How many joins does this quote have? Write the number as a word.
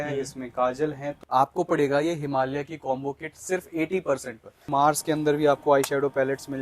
two